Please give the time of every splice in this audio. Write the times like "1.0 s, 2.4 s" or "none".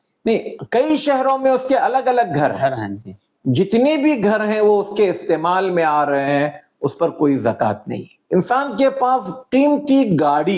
8.1 s